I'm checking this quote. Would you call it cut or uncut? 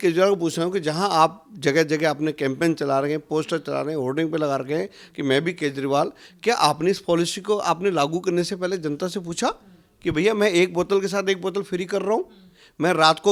uncut